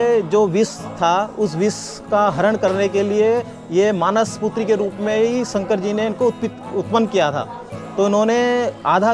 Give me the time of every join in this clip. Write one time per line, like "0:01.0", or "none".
none